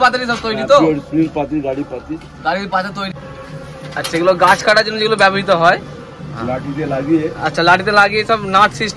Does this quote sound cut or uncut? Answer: cut